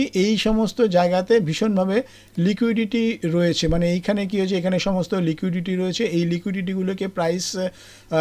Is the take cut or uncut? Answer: uncut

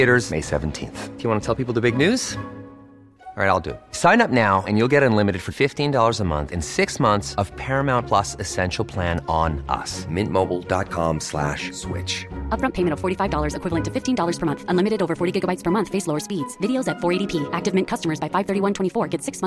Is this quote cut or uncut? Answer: uncut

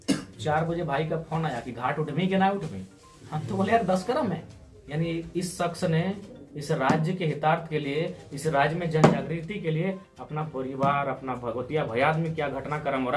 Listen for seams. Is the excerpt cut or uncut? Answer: uncut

